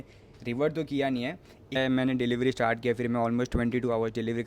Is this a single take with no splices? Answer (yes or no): no